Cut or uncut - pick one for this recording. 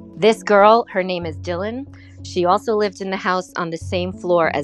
uncut